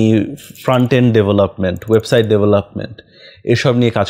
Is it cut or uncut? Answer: uncut